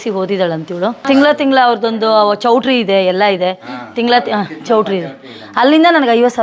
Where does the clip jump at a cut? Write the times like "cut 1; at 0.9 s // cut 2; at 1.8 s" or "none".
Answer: cut 1; at 1.0 s

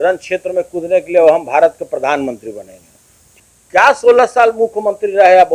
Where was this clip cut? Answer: cut 1; at 3.4 s

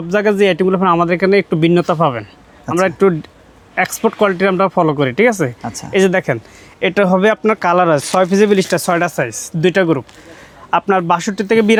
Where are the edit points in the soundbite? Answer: none

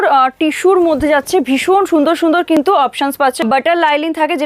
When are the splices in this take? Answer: cut 1; at 3.4 s

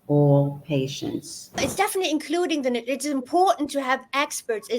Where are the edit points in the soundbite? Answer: cut 1; at 1.6 s

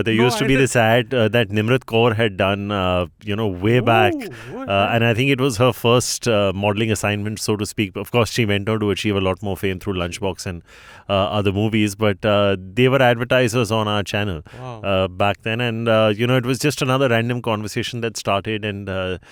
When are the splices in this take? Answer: none

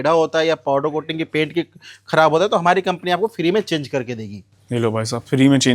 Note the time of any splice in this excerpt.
none

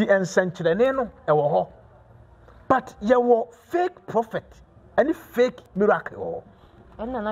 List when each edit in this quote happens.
none

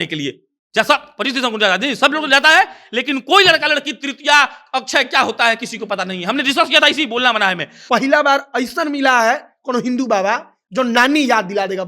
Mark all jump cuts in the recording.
cut 1; at 7.7 s

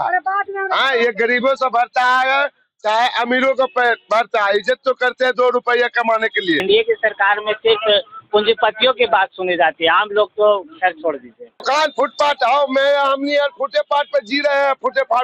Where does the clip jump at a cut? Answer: cut 1; at 6.6 s // cut 2; at 11.6 s

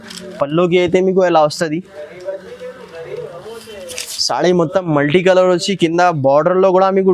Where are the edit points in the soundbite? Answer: none

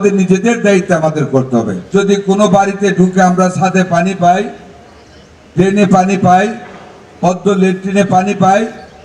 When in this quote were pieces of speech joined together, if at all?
cut 1; at 1.8 s

